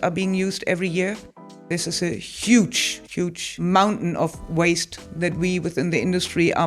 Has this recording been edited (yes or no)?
yes